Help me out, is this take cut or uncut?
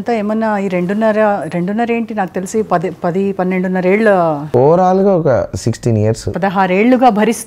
cut